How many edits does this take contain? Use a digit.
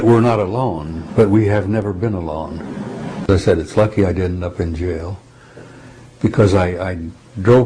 1